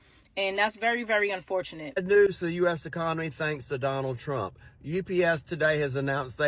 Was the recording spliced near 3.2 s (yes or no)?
no